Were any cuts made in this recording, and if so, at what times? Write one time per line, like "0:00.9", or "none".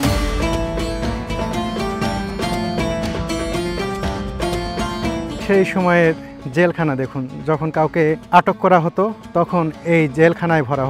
0:05.4
0:08.2
0:09.2